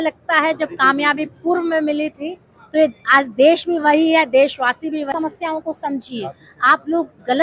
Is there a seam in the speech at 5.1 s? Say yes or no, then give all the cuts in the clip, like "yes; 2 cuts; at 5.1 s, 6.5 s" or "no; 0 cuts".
yes; 1 cut; at 5.1 s